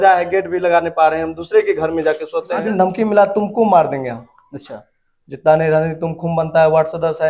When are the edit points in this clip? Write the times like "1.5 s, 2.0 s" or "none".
2.6 s